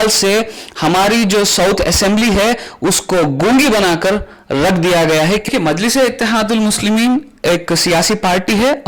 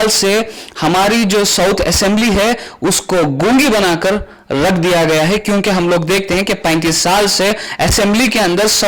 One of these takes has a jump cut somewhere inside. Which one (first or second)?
first